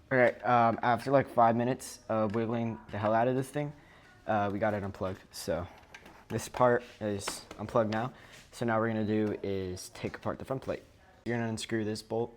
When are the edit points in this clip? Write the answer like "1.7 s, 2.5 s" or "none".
11.2 s